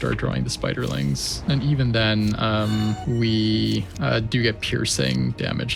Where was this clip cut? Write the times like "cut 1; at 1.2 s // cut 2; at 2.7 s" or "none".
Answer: cut 1; at 1.3 s // cut 2; at 3.0 s // cut 3; at 3.9 s